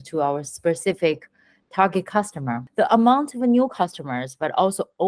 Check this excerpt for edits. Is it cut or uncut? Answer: cut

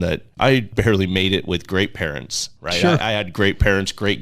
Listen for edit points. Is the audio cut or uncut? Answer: uncut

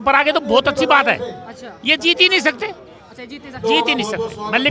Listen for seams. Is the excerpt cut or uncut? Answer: uncut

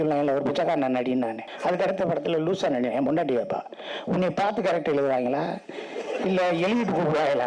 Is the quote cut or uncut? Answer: cut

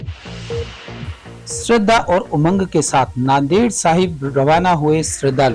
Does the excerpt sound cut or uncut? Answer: cut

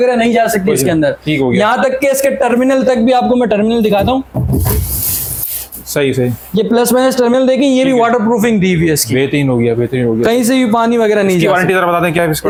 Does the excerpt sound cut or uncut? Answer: uncut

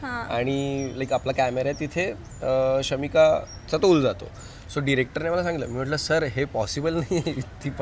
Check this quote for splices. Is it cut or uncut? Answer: uncut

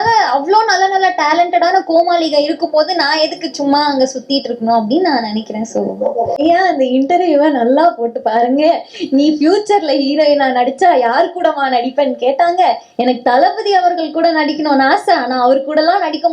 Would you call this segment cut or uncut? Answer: cut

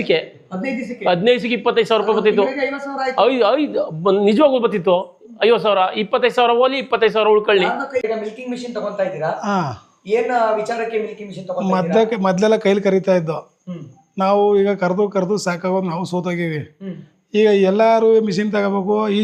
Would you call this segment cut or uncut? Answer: cut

